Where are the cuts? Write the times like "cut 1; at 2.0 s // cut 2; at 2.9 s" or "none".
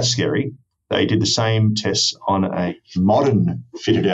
cut 1; at 2.7 s